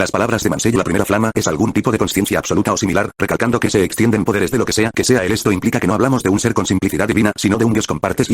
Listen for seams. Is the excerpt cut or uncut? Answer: uncut